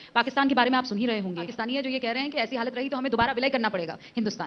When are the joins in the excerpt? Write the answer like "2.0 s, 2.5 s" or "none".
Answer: 1.6 s